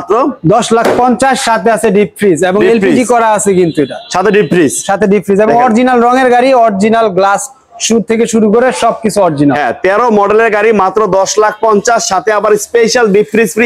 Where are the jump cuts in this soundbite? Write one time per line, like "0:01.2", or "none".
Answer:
none